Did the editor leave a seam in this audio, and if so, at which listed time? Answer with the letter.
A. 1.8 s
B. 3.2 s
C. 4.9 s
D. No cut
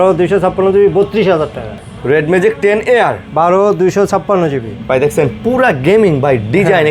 A